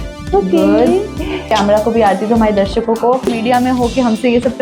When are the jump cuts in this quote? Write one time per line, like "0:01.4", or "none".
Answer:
0:01.5
0:03.3